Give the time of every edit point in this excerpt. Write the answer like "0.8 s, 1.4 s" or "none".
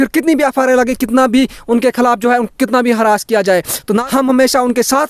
4.0 s

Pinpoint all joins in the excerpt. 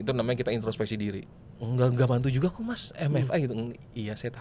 1.3 s

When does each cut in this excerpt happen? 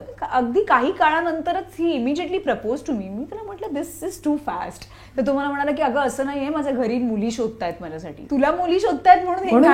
8.2 s

